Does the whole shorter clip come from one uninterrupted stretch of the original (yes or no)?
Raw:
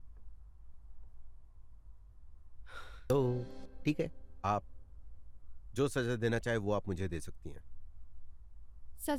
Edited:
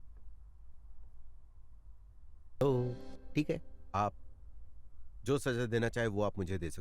no